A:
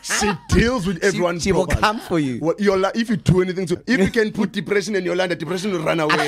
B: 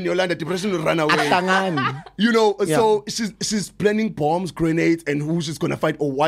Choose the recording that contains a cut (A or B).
A